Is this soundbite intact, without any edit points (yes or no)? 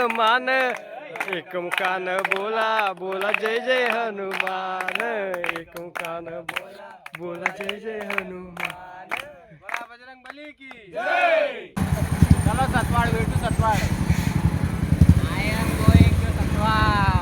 no